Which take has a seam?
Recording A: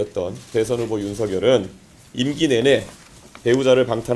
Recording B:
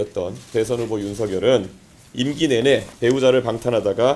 B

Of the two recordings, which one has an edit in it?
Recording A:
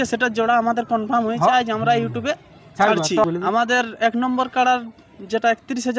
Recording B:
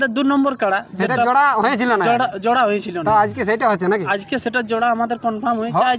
A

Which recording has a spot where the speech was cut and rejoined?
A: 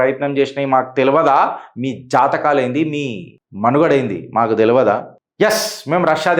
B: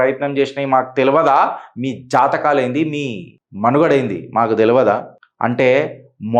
A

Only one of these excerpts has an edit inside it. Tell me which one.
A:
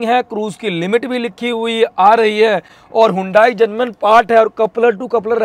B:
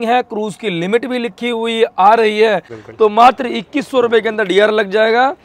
B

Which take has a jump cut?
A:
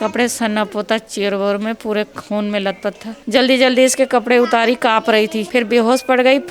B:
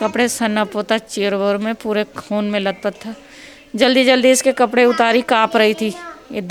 A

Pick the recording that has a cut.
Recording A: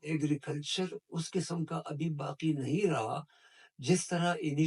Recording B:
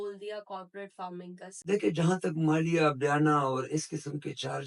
B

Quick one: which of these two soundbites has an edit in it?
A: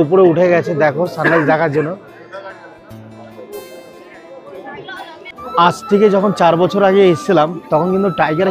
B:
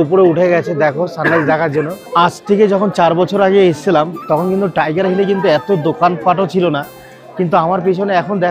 B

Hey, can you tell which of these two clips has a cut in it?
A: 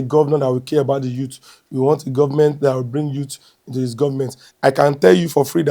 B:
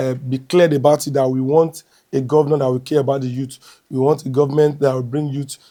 A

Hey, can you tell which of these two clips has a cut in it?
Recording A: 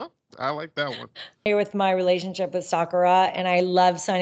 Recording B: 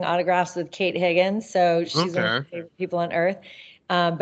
A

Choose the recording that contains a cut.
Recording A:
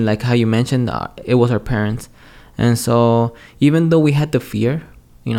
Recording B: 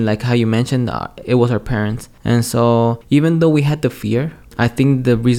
B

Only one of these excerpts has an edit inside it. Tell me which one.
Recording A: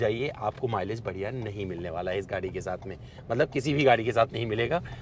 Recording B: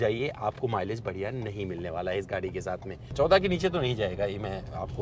B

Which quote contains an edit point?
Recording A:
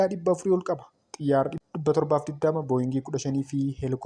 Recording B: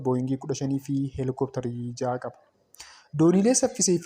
A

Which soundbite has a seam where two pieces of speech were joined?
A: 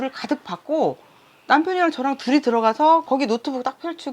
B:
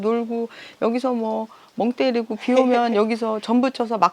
A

